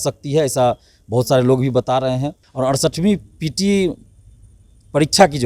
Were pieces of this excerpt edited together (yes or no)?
yes